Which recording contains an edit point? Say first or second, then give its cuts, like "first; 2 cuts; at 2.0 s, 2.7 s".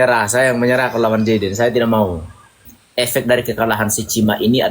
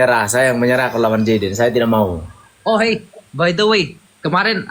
first; 1 cut; at 2.5 s